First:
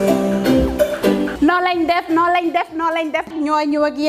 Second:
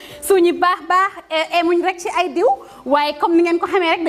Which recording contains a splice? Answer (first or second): first